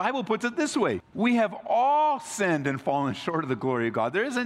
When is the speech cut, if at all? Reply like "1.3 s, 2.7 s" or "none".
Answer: 1.1 s